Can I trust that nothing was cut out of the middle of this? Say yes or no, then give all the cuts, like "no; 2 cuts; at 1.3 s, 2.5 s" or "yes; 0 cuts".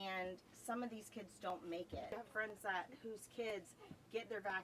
no; 1 cut; at 2.1 s